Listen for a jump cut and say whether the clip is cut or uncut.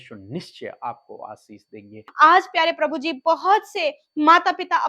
cut